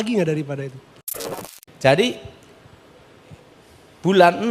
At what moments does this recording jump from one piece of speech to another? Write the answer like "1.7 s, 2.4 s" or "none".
1.3 s